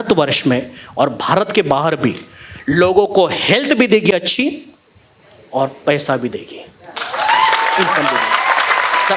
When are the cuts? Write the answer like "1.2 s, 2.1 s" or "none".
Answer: none